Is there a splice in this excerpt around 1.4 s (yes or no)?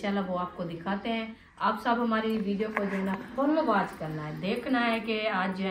yes